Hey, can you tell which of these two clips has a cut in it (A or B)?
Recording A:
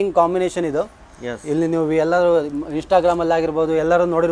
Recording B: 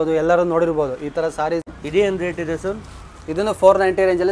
B